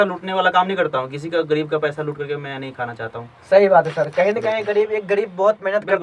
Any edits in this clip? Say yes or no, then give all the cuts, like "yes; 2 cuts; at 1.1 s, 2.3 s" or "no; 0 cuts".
no; 0 cuts